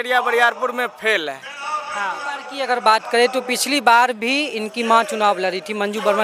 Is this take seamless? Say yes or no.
no